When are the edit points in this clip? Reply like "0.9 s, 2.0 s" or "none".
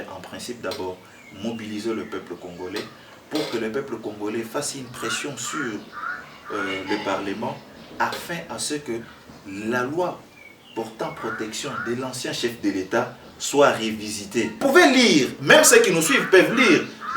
14.6 s